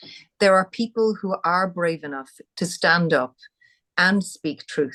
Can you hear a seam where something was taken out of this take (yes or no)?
no